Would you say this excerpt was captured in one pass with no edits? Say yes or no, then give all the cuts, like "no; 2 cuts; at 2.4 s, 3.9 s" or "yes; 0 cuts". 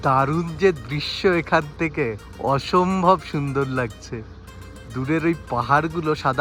yes; 0 cuts